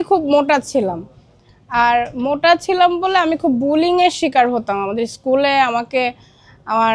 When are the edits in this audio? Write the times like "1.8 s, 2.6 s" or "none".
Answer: none